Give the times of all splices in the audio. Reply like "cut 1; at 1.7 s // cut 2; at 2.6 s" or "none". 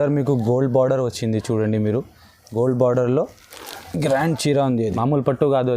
cut 1; at 4.9 s